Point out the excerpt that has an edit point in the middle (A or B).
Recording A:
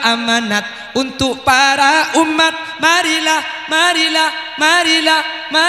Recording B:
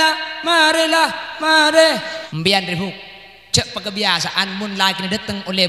B